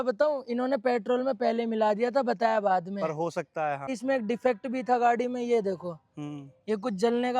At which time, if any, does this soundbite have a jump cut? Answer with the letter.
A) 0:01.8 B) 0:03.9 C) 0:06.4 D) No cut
B